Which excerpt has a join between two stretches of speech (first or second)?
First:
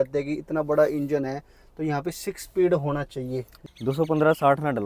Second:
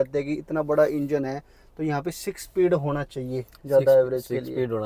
first